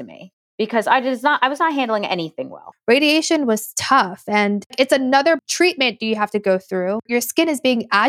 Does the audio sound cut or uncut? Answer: cut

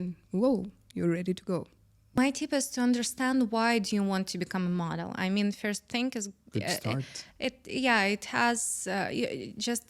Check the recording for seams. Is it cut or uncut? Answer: cut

